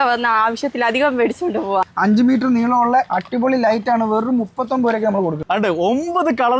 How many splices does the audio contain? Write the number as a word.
two